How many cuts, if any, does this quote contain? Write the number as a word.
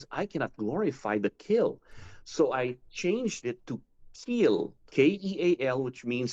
one